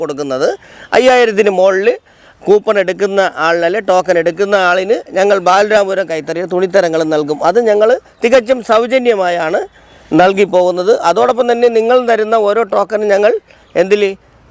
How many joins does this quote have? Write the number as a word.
zero